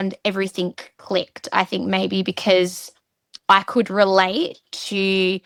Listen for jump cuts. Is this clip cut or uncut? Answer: uncut